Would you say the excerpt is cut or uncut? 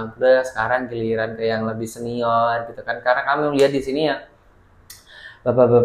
uncut